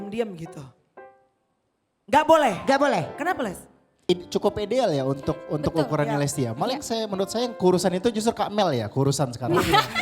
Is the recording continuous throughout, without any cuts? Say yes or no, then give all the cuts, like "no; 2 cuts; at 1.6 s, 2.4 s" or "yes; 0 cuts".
no; 1 cut; at 3.9 s